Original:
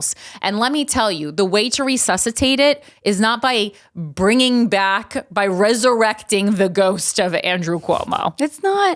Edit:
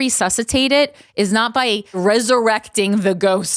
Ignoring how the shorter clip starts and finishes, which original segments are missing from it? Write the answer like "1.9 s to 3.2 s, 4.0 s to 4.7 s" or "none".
3.8 s to 5.5 s